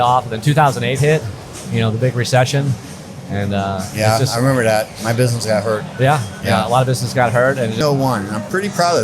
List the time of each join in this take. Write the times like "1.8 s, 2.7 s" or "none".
7.8 s